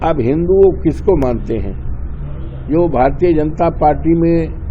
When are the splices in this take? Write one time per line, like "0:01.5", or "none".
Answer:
none